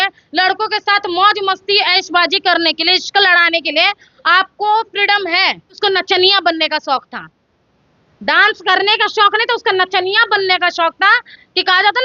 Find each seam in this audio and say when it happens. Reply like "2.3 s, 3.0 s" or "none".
5.8 s